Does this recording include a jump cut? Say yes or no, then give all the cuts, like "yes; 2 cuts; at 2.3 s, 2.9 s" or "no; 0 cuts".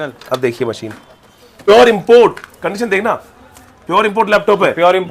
yes; 1 cut; at 1.7 s